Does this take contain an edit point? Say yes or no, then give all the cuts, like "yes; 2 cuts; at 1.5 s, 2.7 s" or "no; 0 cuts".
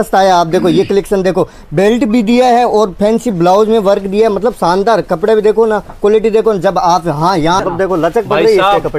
yes; 1 cut; at 7.6 s